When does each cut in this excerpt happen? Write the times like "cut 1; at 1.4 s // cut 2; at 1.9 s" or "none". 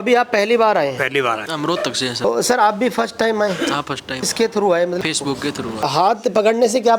cut 1; at 1.4 s // cut 2; at 5.8 s